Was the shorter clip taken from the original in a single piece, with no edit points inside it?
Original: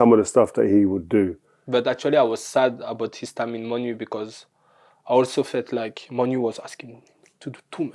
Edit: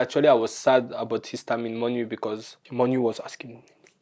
no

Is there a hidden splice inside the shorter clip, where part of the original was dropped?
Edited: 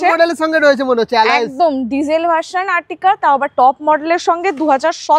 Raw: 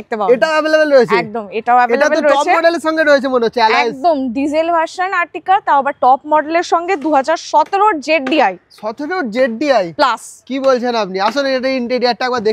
no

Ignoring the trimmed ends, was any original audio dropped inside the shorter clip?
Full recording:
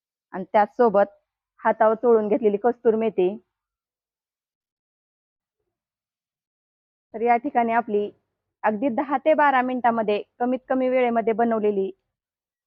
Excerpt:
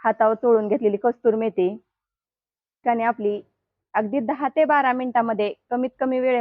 yes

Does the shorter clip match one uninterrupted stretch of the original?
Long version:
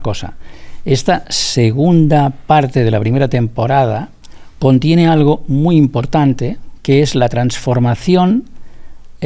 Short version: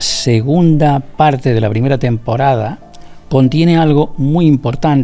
yes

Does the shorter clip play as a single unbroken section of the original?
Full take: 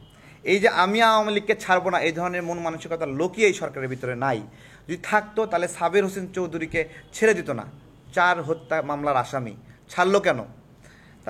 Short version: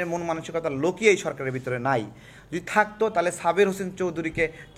yes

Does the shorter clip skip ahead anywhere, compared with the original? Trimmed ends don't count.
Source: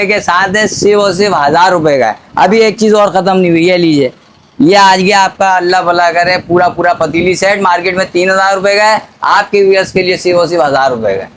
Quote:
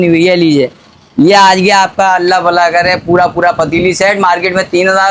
no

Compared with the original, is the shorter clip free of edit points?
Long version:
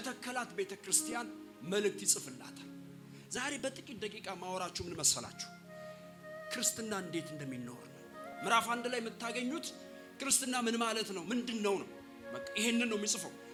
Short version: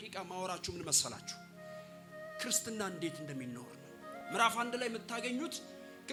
yes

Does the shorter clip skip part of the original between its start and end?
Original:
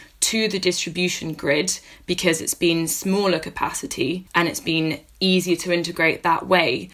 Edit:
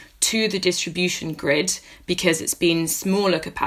no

